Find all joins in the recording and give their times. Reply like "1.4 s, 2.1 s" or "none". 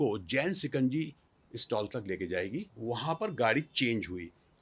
2.7 s

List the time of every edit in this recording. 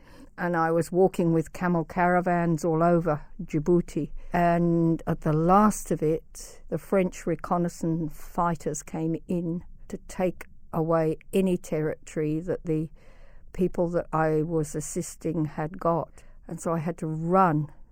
none

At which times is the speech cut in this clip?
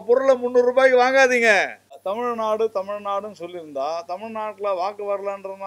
2.0 s

